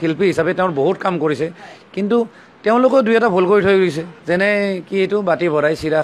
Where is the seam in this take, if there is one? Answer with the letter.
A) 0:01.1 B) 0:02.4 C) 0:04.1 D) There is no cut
C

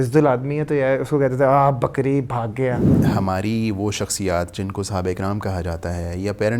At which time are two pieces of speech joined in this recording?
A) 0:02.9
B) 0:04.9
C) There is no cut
A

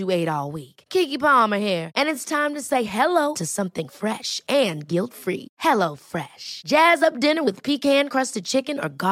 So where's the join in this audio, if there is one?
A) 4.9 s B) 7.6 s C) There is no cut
C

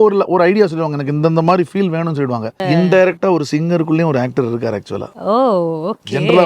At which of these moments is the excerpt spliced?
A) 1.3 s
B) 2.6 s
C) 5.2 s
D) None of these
B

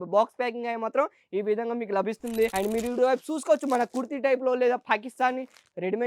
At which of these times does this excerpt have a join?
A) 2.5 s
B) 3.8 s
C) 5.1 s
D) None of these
A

